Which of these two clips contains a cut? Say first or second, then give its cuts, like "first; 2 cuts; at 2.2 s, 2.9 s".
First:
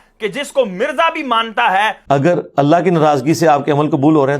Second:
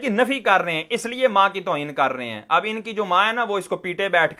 first; 1 cut; at 2.0 s